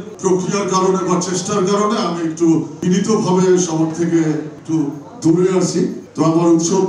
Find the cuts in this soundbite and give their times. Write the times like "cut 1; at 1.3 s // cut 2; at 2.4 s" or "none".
none